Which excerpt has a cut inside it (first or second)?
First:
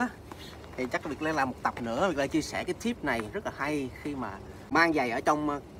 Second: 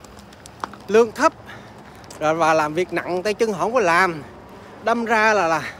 first